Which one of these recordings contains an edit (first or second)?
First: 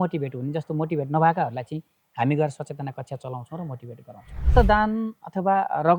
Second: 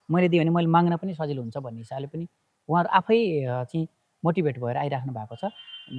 first